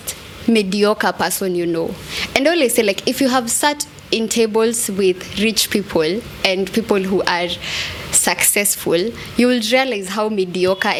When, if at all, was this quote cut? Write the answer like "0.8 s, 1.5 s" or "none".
none